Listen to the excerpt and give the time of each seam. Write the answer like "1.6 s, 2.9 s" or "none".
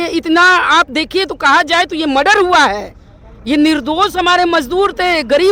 none